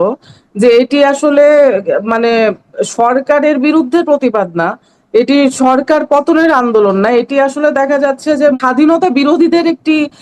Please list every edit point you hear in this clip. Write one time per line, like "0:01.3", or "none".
0:08.5